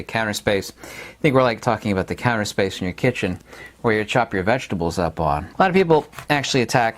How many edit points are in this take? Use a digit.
1